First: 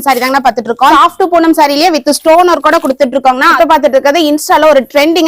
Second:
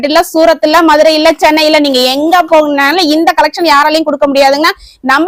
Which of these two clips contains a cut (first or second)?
first